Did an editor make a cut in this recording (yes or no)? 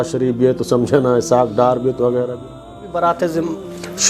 yes